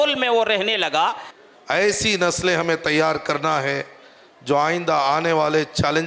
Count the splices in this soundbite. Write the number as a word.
one